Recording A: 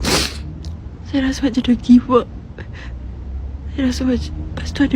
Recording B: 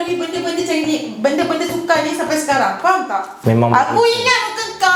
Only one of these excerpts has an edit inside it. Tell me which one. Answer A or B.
B